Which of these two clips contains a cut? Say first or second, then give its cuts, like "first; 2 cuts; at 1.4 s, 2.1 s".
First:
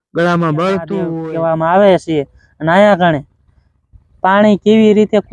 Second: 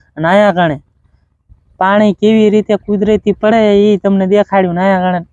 first; 1 cut; at 1.2 s